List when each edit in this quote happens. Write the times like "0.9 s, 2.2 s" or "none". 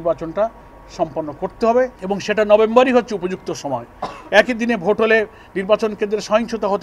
2.0 s